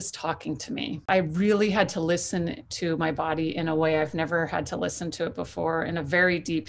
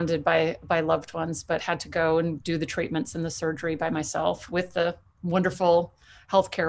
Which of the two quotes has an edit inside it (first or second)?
first